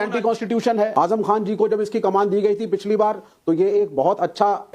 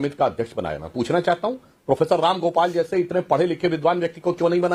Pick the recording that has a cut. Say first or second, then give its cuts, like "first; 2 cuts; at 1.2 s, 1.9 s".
first; 1 cut; at 0.9 s